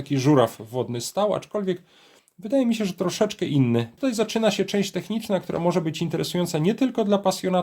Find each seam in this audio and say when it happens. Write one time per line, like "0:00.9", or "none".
0:04.0